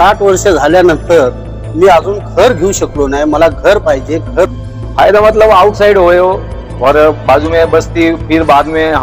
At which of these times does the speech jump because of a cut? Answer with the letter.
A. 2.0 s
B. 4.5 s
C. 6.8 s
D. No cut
B